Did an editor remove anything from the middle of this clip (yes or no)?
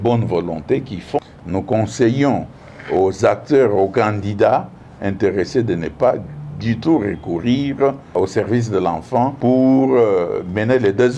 yes